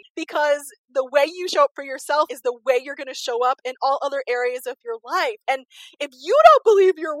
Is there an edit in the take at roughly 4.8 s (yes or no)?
no